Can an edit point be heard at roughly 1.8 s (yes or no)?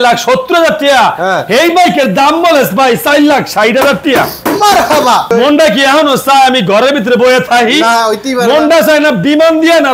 no